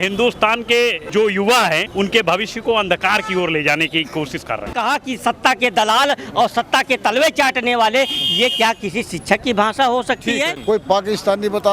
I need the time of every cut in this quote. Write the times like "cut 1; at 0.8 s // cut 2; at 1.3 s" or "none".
cut 1; at 1.1 s // cut 2; at 4.7 s // cut 3; at 10.5 s